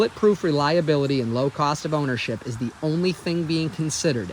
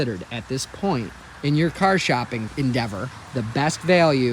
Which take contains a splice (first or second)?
second